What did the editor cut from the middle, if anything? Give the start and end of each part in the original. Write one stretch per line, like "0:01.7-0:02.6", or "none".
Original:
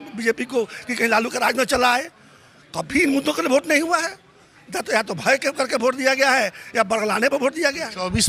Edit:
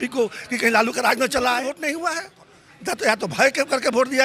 0:02.3-0:03.7